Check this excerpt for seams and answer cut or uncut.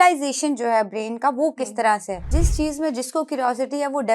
cut